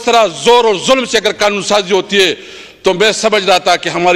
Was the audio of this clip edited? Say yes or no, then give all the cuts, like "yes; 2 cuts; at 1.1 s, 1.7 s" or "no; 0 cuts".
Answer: no; 0 cuts